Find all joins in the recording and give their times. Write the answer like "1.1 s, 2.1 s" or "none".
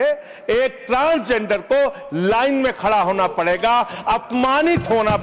none